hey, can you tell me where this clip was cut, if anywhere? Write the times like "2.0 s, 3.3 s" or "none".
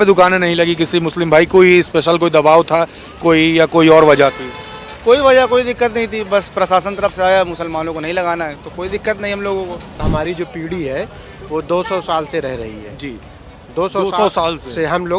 10.0 s

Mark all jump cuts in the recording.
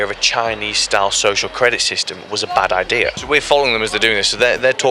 3.2 s

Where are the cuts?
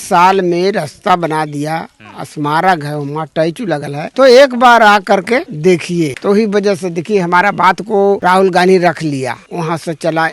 8.2 s, 9.4 s

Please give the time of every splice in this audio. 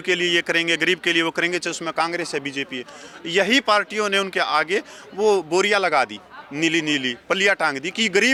none

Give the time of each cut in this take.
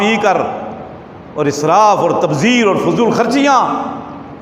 none

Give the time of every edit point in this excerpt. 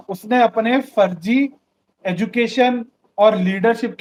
none

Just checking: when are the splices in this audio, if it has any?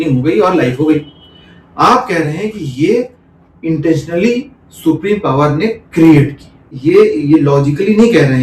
6.7 s

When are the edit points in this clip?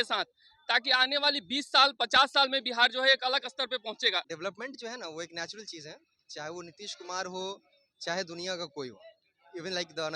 4.2 s

